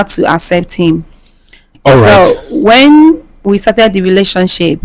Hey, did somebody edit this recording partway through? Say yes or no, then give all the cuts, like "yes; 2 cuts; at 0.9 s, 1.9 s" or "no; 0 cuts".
no; 0 cuts